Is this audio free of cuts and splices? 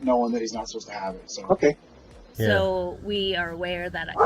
no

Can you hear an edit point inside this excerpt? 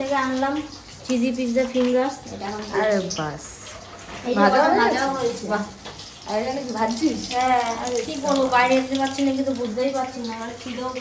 no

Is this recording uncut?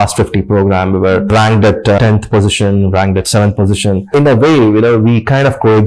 no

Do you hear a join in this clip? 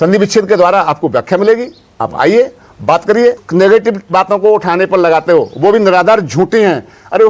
yes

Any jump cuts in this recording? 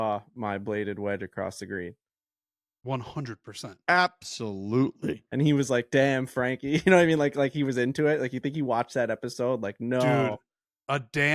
no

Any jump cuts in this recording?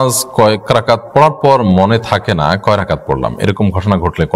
no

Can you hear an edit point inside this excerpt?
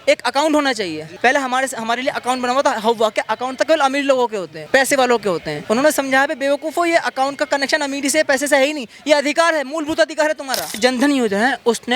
yes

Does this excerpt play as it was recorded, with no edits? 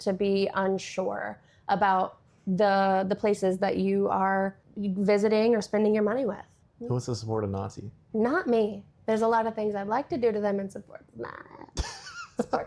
no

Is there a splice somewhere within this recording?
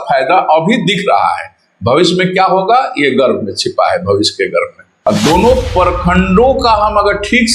yes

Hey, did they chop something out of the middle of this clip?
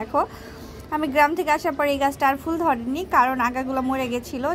no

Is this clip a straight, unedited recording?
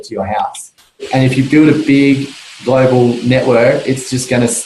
no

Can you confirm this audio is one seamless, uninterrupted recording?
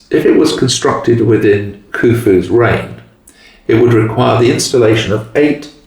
yes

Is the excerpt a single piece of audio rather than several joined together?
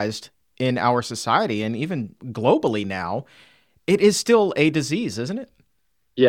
no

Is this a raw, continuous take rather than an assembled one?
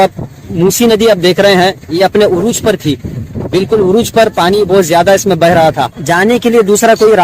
no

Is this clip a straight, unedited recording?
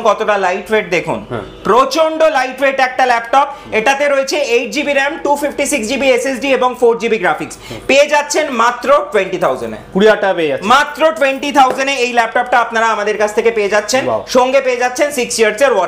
yes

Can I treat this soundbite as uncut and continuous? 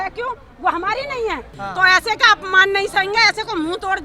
no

